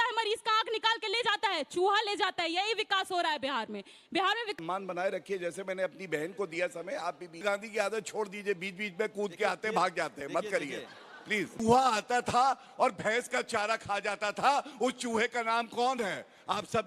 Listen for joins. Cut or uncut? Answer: cut